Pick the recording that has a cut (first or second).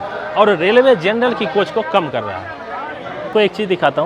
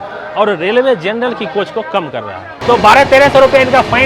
second